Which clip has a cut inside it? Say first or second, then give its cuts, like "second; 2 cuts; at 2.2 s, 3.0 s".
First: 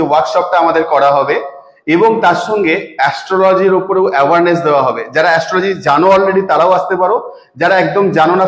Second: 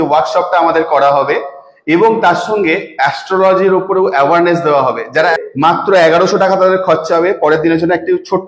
second; 1 cut; at 5.4 s